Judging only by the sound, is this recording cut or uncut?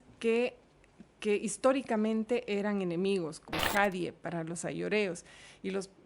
cut